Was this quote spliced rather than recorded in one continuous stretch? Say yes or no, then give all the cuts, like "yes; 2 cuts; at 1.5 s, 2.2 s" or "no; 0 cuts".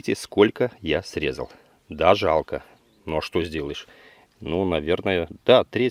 no; 0 cuts